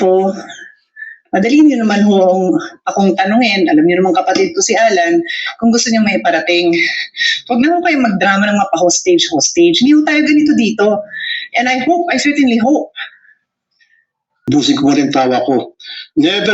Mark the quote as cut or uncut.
cut